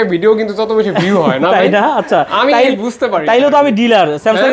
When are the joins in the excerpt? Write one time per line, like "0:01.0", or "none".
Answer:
none